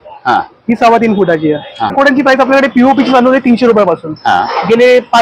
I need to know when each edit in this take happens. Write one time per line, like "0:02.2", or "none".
0:01.9

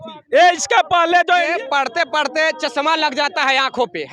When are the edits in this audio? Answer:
0:01.5

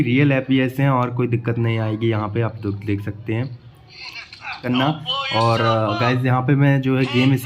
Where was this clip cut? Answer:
0:04.6

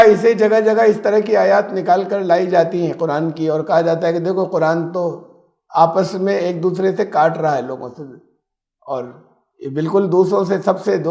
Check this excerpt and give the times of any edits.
none

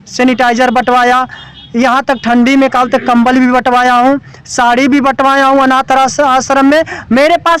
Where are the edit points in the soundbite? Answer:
none

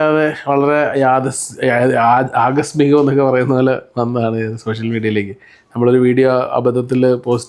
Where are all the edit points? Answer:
none

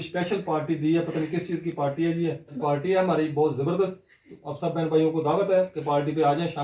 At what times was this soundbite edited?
0:02.5

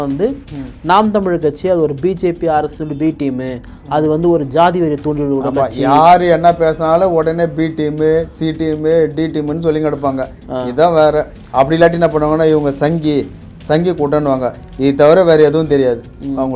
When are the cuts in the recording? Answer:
none

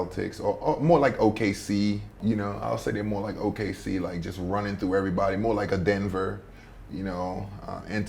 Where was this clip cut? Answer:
0:02.2

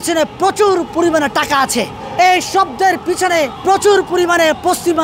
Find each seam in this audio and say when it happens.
0:02.0
0:03.6

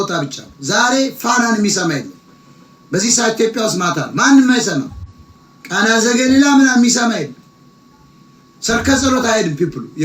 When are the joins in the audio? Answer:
none

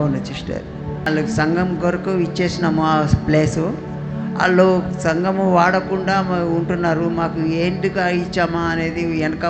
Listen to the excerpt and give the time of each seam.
0:01.1

